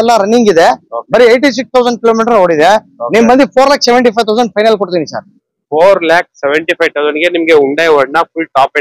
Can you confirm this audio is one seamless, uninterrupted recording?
yes; 0 cuts

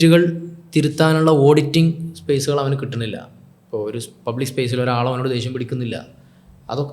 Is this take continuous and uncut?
yes; 0 cuts

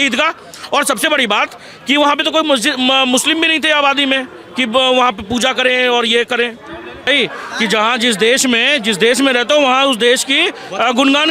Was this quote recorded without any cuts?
no; 1 cut; at 7.1 s

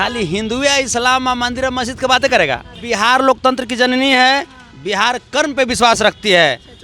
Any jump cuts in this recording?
yes; 1 cut; at 2.7 s

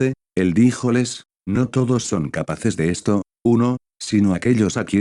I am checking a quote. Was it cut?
no; 0 cuts

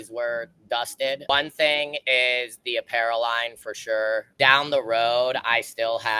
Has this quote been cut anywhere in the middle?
yes; 2 cuts; at 1.3 s, 4.3 s

